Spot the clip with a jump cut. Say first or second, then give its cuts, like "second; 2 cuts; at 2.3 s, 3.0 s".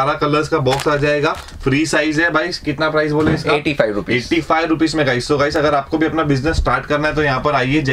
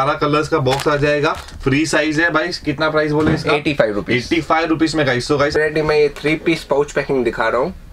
second; 1 cut; at 5.6 s